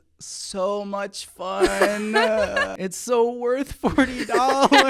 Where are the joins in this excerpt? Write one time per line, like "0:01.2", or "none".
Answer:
0:02.7